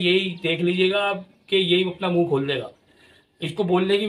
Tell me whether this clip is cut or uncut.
uncut